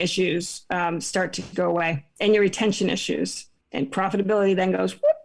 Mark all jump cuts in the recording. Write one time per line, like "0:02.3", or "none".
none